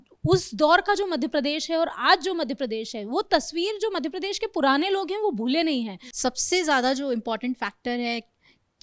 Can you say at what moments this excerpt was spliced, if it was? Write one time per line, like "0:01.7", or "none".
0:06.0